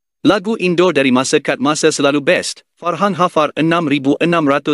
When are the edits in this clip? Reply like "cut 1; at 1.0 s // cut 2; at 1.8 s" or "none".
cut 1; at 2.9 s